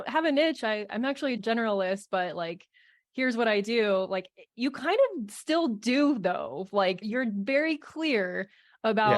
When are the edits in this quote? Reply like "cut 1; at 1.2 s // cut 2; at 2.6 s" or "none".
cut 1; at 7.1 s